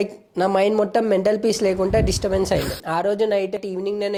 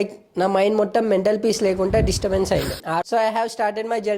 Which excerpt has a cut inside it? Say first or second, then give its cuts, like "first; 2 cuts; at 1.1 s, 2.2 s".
second; 1 cut; at 3.0 s